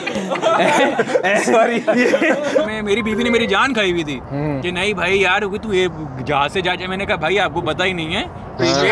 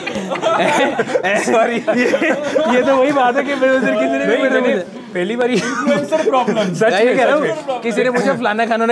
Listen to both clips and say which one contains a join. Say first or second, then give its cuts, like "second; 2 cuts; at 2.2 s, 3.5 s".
first; 1 cut; at 2.6 s